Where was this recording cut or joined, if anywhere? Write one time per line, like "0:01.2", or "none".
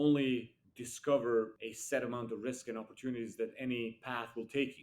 0:01.6